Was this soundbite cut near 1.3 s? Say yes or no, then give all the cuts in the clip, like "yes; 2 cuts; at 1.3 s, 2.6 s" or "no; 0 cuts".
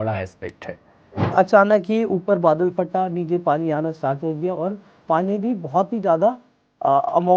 yes; 1 cut; at 1.3 s